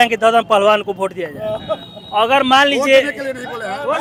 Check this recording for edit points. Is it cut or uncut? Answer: uncut